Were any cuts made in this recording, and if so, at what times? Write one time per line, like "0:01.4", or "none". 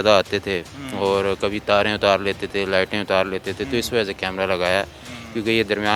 none